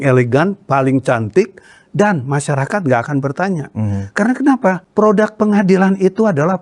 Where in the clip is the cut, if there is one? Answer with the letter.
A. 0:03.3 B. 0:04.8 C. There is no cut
B